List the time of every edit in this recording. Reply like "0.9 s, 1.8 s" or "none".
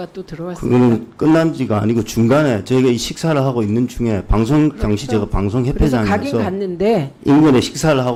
none